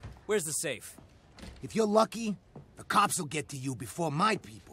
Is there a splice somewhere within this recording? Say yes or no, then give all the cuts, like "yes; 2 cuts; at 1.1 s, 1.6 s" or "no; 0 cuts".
no; 0 cuts